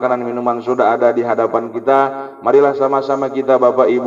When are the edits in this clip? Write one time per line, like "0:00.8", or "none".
none